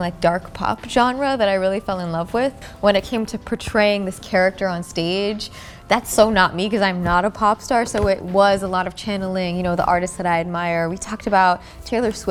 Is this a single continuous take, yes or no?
yes